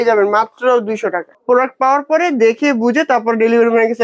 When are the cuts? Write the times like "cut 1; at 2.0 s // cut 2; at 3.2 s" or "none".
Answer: cut 1; at 1.3 s